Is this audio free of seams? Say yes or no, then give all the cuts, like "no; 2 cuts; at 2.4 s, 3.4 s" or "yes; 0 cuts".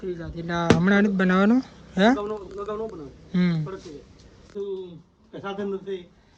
no; 1 cut; at 4.5 s